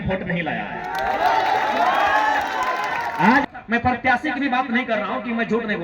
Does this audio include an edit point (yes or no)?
yes